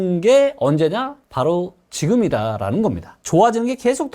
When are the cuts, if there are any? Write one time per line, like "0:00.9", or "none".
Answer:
0:03.1